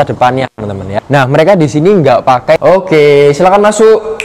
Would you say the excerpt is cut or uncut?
cut